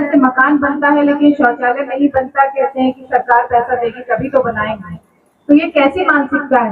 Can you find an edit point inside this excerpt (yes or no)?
no